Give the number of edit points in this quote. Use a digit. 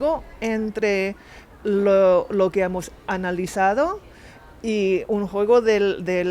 0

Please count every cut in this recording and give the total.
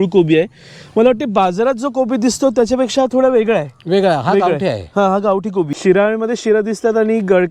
1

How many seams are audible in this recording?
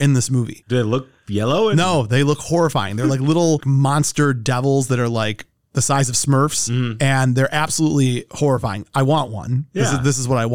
0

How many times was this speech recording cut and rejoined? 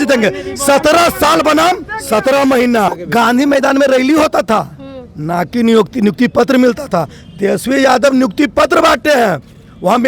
1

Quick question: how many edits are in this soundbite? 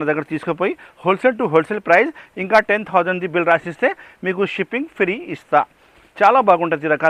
0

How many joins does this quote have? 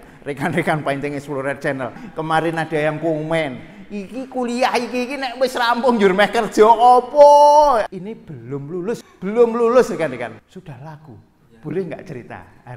4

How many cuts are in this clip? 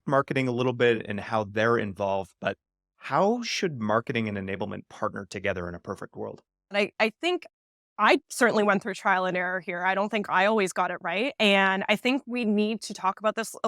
2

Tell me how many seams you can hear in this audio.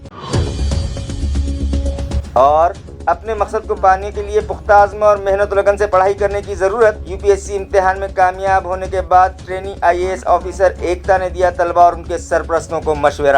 1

